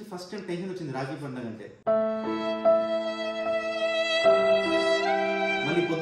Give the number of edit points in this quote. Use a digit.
0